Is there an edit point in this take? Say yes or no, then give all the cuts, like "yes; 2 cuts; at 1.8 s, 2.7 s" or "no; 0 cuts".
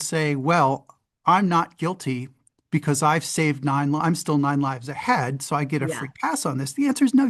no; 0 cuts